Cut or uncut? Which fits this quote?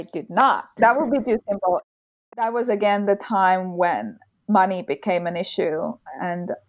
cut